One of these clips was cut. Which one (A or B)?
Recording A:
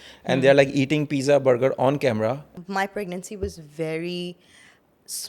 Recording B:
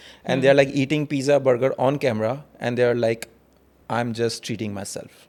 A